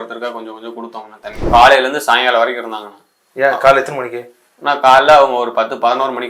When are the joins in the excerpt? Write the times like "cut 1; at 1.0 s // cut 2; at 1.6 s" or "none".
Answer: cut 1; at 1.5 s